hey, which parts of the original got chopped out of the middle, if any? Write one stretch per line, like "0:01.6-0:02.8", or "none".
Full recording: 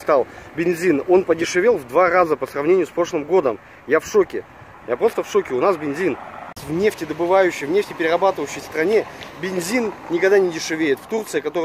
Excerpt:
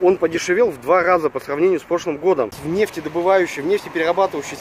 0:03.7-0:06.6